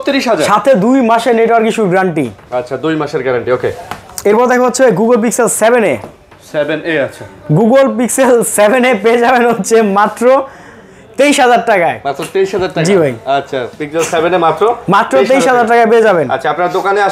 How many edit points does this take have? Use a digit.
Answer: 0